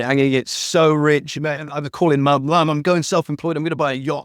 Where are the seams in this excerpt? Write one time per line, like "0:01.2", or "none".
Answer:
none